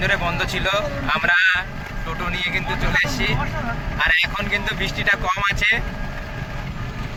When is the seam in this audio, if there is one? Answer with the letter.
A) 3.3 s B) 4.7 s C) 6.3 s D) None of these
D